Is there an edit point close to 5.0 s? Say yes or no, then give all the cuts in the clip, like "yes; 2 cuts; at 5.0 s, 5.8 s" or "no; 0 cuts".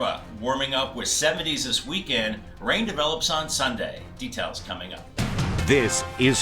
yes; 1 cut; at 5.0 s